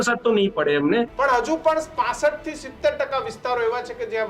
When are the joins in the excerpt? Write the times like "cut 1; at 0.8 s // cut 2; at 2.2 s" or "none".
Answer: cut 1; at 1.1 s